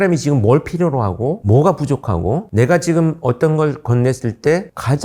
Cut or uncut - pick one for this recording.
uncut